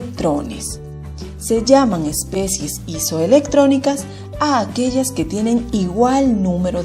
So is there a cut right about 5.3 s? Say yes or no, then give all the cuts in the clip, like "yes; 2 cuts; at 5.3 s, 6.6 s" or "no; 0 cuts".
yes; 1 cut; at 5.3 s